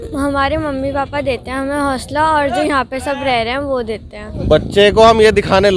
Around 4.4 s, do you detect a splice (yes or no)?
yes